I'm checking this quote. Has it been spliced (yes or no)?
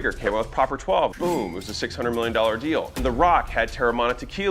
yes